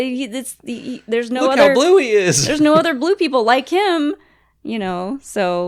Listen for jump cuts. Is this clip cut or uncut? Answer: uncut